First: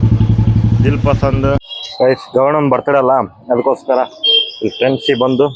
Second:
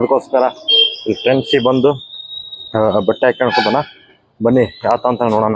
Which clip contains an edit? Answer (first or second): first